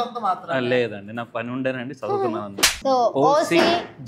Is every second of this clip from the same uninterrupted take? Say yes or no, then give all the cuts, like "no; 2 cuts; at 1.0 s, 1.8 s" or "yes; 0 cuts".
no; 1 cut; at 2.7 s